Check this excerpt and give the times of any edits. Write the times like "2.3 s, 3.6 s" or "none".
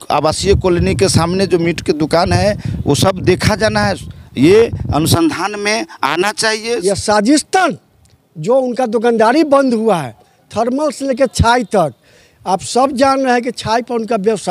6.8 s